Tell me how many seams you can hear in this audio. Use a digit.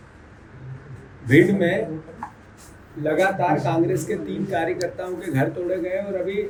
0